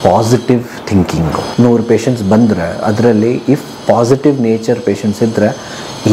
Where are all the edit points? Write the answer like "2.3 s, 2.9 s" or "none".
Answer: 1.4 s